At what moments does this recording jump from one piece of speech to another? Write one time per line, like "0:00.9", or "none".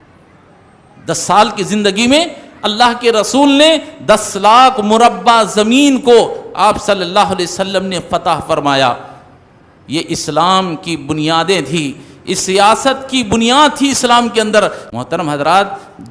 0:14.8